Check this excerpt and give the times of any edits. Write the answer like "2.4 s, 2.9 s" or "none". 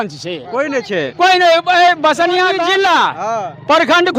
2.6 s